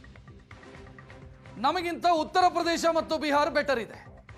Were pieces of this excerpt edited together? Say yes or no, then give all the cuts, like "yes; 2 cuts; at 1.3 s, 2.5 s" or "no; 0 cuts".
no; 0 cuts